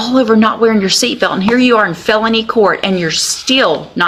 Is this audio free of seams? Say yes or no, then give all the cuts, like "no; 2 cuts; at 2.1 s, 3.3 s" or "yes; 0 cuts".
yes; 0 cuts